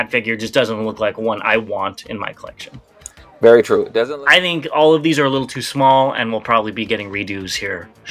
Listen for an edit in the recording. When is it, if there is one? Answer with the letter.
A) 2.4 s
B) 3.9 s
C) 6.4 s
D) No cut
B